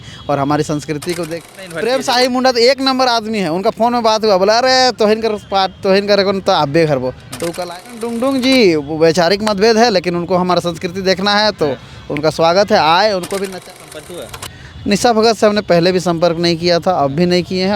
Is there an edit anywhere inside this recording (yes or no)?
yes